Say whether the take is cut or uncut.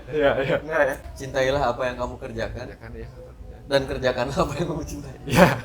cut